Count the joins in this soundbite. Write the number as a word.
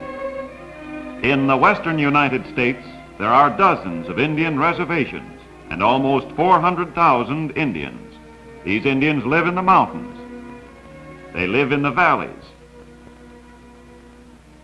zero